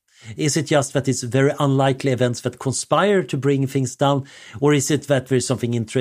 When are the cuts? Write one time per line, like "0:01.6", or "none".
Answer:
none